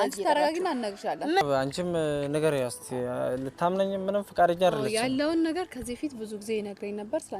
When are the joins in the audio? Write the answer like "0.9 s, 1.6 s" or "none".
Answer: 1.4 s